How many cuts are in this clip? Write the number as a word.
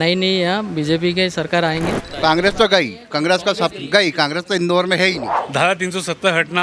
two